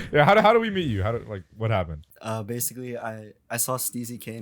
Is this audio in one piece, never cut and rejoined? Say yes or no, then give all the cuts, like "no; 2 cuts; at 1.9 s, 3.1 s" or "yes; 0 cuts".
no; 1 cut; at 2.0 s